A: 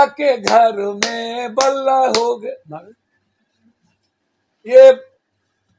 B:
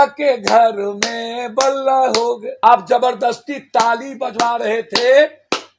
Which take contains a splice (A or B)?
B